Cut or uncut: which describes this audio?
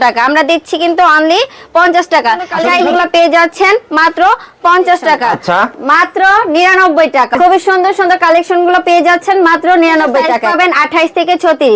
cut